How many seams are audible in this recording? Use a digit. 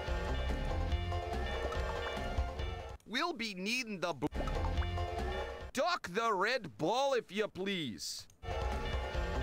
5